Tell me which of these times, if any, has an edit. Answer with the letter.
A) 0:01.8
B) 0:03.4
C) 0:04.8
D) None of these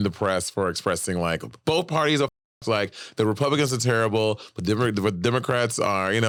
D